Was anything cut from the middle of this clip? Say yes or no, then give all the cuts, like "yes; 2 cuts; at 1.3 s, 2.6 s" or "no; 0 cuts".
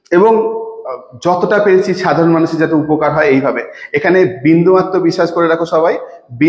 no; 0 cuts